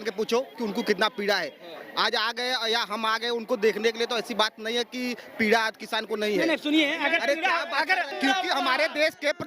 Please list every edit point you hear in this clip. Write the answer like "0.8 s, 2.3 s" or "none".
8.1 s